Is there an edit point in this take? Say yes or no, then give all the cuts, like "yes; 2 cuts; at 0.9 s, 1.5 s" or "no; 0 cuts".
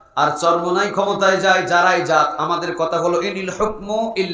no; 0 cuts